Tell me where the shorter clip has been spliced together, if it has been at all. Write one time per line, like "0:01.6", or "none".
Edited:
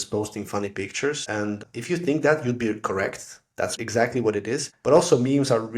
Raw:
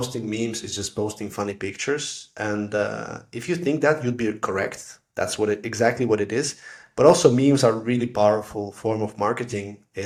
0:01.5
0:03.8
0:04.7